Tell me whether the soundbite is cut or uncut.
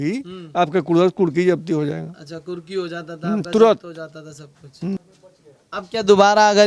cut